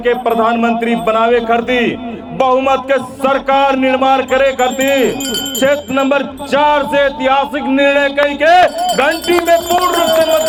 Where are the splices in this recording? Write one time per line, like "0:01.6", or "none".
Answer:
none

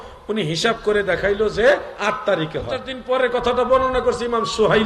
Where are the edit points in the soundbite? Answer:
0:02.9

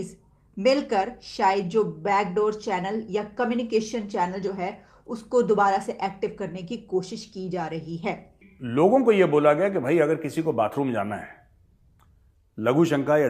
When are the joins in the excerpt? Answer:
0:08.4

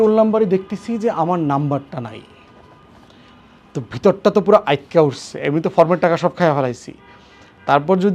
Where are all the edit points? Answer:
none

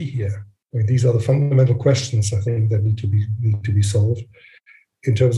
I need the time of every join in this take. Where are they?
none

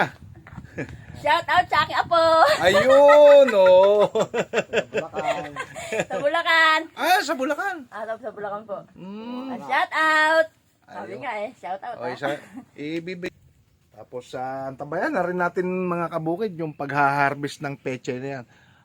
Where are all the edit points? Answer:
0:13.3

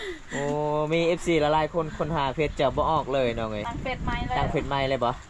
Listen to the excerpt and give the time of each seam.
0:03.7

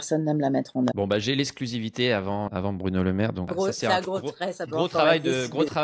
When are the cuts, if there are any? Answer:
0:00.9
0:02.5
0:03.5

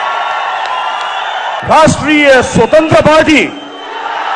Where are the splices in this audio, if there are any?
0:01.6

